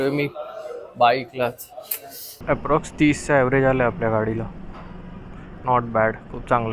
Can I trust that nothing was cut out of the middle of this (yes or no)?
no